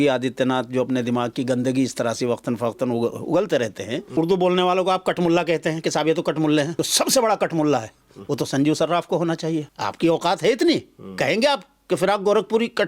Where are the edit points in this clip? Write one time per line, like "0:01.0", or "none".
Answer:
0:04.1
0:06.8
0:09.7